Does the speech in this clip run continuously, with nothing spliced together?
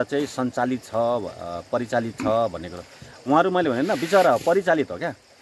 yes; 0 cuts

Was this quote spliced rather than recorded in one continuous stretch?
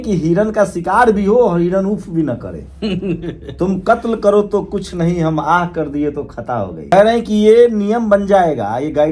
yes; 1 cut; at 6.9 s

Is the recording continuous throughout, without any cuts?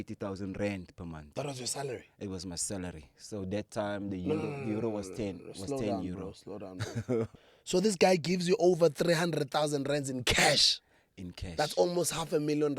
no; 1 cut; at 7.3 s

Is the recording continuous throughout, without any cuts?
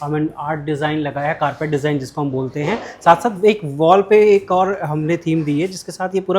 yes; 0 cuts

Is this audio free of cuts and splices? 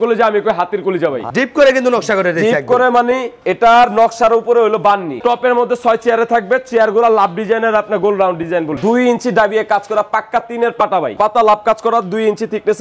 no; 4 cuts; at 1.2 s, 5.2 s, 8.8 s, 11.1 s

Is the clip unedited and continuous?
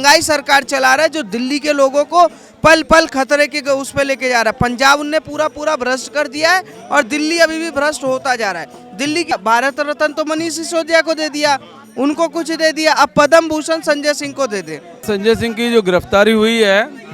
no; 2 cuts; at 9.3 s, 15.0 s

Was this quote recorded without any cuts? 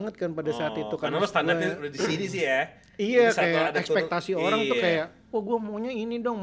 yes; 0 cuts

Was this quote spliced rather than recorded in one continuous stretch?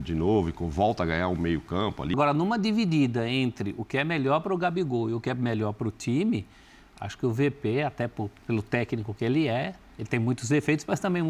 yes; 1 cut; at 2.1 s

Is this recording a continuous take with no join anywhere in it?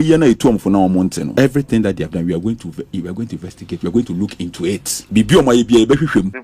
no; 2 cuts; at 1.2 s, 4.9 s

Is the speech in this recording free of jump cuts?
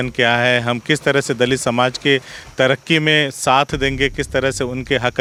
yes; 0 cuts

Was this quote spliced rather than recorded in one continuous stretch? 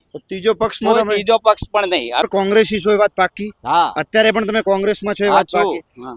yes; 1 cut; at 2.3 s

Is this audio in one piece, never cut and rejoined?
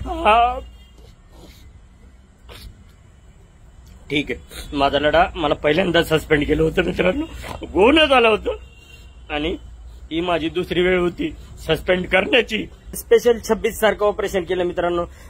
no; 1 cut; at 13.0 s

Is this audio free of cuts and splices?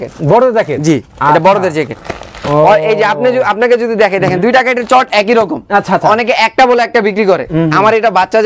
yes; 0 cuts

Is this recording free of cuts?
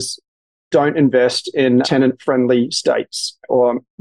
no; 1 cut; at 1.9 s

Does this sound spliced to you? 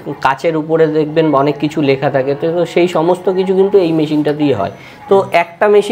no; 0 cuts

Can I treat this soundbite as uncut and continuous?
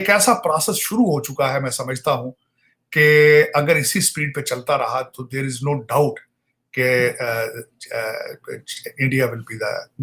yes; 0 cuts

